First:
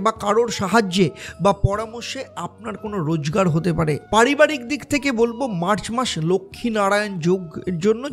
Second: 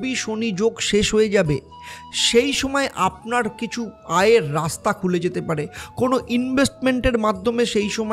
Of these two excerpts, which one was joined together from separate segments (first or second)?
first